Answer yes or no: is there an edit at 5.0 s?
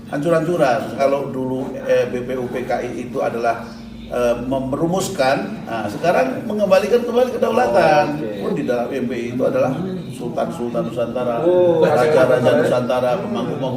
no